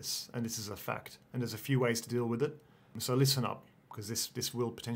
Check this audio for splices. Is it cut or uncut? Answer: cut